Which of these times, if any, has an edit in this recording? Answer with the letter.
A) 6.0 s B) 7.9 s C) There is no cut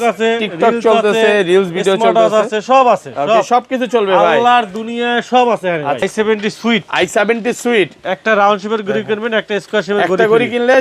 A